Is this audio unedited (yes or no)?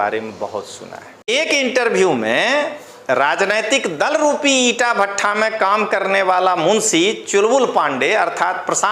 no